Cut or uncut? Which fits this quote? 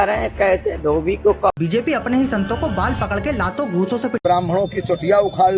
cut